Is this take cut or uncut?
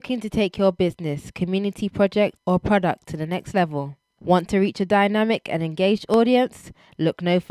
cut